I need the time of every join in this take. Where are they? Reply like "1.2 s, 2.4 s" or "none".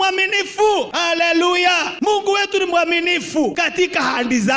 0.9 s, 1.9 s, 3.6 s